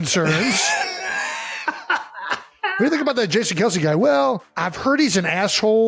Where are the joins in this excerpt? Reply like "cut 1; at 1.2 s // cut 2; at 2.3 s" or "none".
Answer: cut 1; at 4.8 s